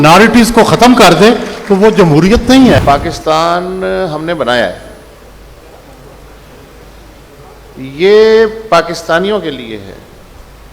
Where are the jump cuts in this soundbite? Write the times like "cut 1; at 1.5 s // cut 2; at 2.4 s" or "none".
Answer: cut 1; at 2.8 s

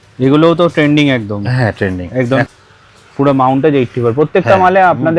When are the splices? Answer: cut 1; at 2.5 s

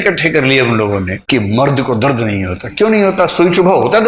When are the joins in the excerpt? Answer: none

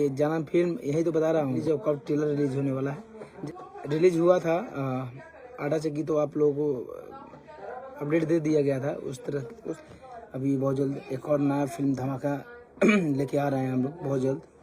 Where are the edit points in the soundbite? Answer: cut 1; at 1.6 s // cut 2; at 3.4 s // cut 3; at 9.8 s

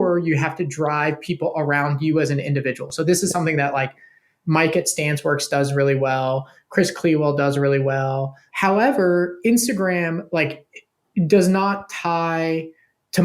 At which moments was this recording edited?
cut 1; at 2.9 s // cut 2; at 8.4 s

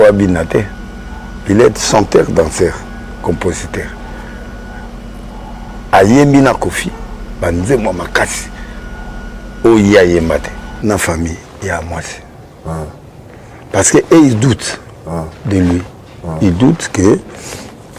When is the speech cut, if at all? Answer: cut 1; at 10.8 s

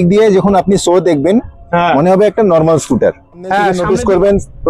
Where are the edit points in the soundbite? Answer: cut 1; at 3.8 s

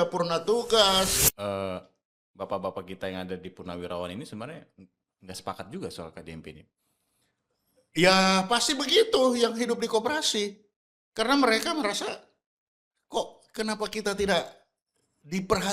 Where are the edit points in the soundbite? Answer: cut 1; at 1.2 s

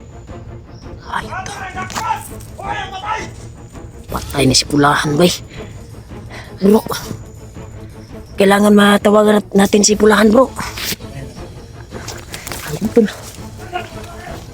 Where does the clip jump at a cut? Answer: cut 1; at 1.0 s

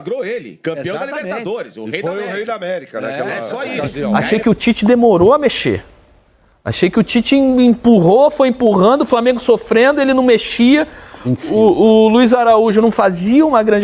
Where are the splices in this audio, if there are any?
cut 1; at 4.0 s

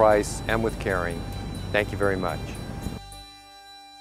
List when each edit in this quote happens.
cut 1; at 3.1 s

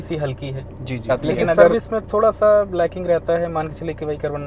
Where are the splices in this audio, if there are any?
cut 1; at 1.7 s

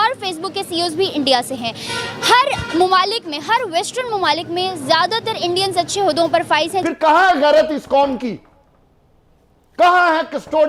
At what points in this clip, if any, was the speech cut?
cut 1; at 6.8 s

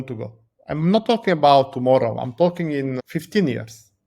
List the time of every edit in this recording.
cut 1; at 3.0 s

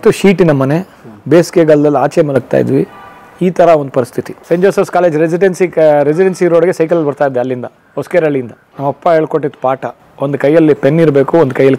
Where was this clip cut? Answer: cut 1; at 4.4 s // cut 2; at 8.6 s

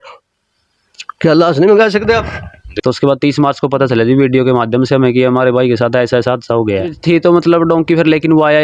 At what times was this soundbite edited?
cut 1; at 2.7 s // cut 2; at 7.0 s

